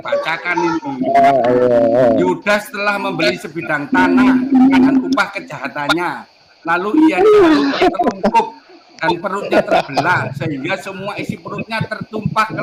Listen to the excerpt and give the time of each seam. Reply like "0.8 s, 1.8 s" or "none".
none